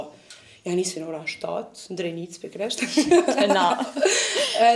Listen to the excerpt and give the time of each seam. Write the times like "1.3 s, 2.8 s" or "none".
none